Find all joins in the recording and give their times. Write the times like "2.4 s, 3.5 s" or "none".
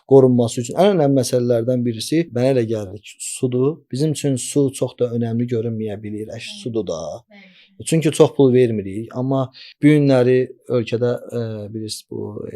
2.3 s, 3.8 s, 9.6 s